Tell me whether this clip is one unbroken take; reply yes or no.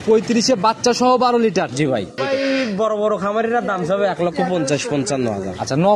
no